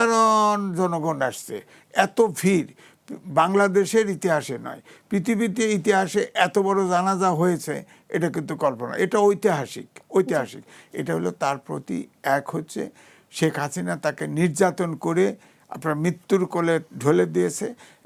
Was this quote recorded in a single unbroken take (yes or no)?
yes